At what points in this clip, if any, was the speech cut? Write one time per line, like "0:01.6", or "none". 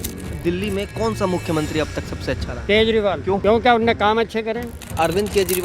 0:02.5
0:03.3
0:04.8

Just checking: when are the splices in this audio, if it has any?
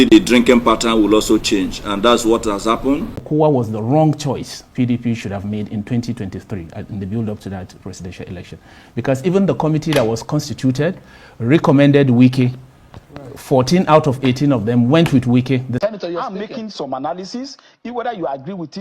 0:03.2
0:15.7

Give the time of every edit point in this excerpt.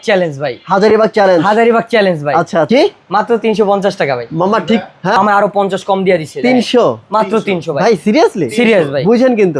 0:02.7
0:05.2

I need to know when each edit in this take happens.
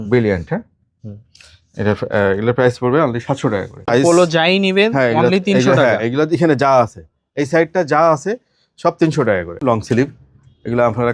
0:03.8
0:09.6

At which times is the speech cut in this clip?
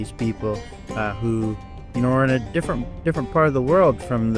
none

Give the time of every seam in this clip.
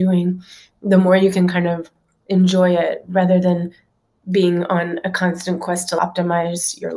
0:06.0

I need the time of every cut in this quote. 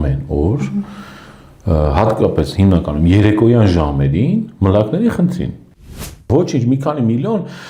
0:05.9

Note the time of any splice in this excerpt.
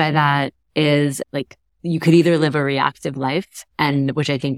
0:01.2
0:03.6

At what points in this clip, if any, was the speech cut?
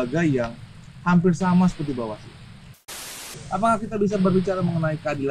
0:03.0

